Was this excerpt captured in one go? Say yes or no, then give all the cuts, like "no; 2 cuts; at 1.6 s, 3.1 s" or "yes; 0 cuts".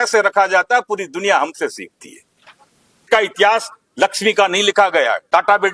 no; 1 cut; at 3.1 s